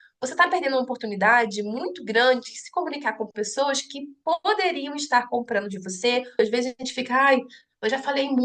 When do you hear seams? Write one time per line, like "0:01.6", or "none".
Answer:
0:06.4